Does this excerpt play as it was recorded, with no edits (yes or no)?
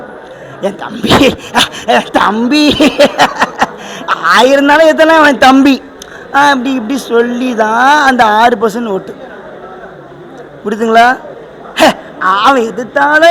yes